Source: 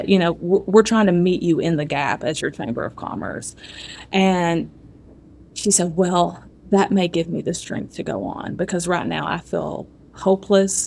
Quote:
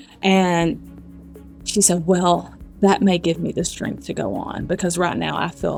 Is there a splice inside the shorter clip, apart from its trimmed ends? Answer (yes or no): no